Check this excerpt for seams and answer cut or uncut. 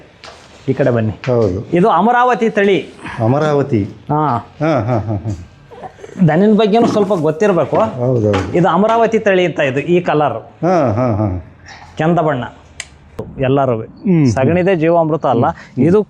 cut